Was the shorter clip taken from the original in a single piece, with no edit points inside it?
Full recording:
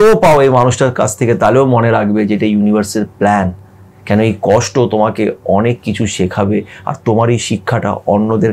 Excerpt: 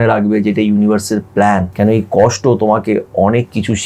no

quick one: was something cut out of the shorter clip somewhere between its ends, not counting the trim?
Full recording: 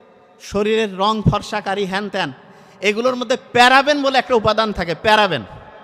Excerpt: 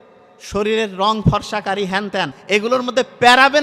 yes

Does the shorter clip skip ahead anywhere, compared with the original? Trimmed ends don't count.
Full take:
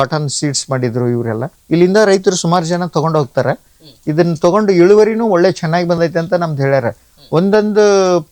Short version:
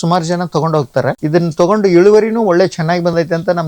yes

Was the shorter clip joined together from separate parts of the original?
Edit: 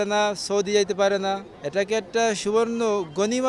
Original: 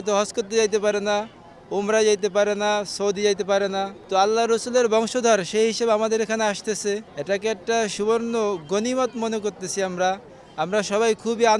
yes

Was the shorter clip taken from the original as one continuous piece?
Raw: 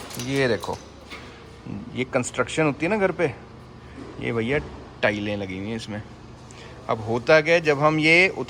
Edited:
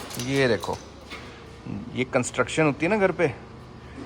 yes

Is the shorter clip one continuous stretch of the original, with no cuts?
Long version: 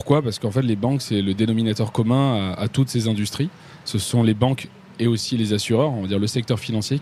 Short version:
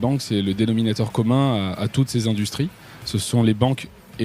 yes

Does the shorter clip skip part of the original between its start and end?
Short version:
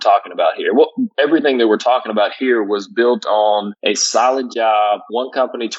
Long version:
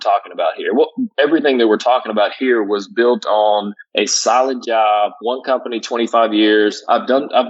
yes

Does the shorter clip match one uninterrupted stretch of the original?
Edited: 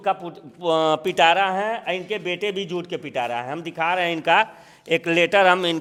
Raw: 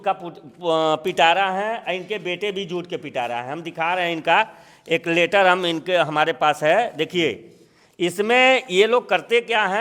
yes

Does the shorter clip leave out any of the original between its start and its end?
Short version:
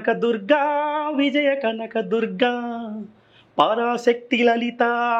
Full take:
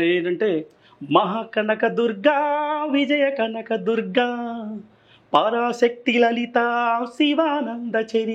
no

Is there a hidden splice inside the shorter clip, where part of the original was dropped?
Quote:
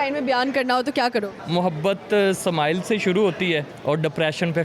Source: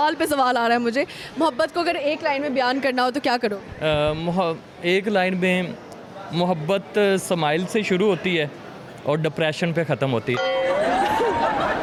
yes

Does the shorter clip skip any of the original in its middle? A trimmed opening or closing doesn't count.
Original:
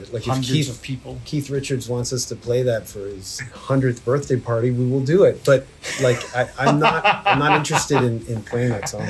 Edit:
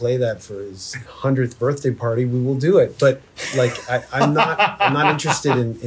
no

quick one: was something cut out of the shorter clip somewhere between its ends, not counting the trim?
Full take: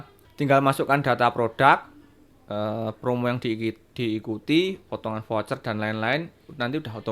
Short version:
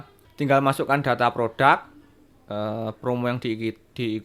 no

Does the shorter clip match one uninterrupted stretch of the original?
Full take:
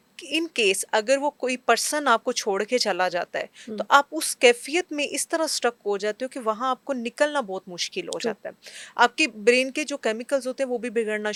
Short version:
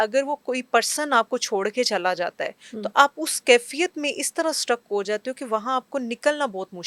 yes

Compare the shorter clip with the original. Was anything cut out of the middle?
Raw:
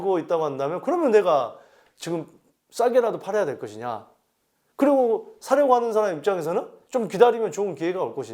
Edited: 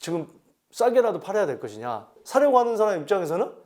yes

